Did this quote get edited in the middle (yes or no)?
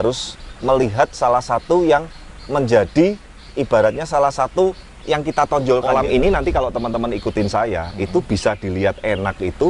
yes